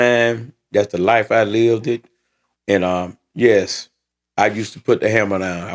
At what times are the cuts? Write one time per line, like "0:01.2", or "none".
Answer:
none